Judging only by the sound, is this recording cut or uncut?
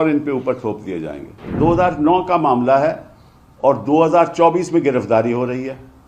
cut